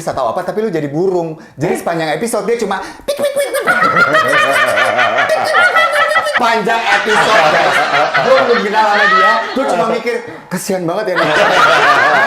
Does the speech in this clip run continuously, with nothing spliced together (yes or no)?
no